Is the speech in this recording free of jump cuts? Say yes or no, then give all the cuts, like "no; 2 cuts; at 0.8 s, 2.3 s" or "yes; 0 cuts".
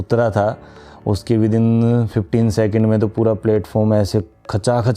yes; 0 cuts